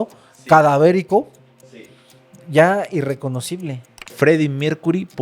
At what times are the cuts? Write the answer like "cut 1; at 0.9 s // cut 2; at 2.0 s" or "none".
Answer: cut 1; at 4.1 s